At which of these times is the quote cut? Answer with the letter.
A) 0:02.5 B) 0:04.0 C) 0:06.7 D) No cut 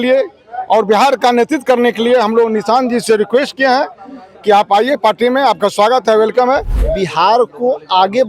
C